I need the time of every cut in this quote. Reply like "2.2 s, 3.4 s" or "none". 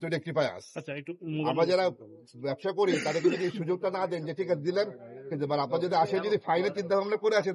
none